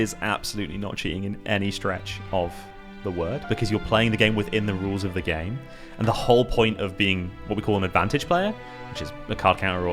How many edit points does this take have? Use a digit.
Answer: 0